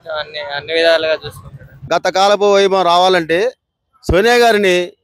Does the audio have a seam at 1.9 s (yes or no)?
yes